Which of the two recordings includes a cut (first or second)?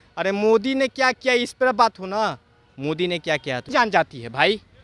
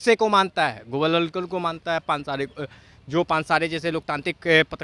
first